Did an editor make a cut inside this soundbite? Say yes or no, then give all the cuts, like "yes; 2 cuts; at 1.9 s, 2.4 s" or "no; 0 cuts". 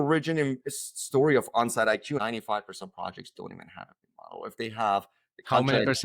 yes; 1 cut; at 2.2 s